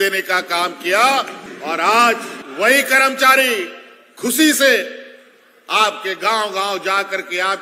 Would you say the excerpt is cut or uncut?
cut